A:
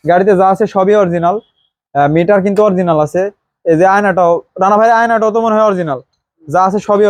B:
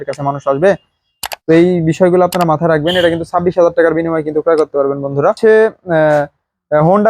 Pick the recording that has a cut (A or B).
B